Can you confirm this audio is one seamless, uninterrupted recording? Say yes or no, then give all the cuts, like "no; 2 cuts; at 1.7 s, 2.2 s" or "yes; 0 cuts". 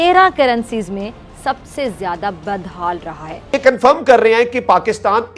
no; 1 cut; at 3.5 s